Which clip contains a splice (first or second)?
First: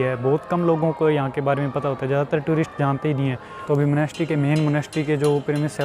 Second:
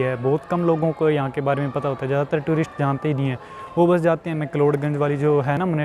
first